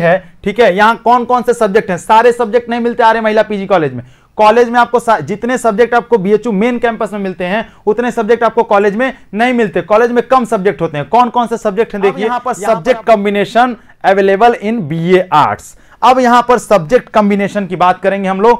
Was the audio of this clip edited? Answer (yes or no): yes